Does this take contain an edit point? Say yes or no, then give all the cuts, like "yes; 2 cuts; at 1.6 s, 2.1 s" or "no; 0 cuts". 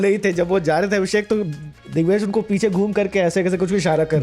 no; 0 cuts